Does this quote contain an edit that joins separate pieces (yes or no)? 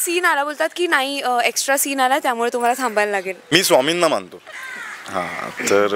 yes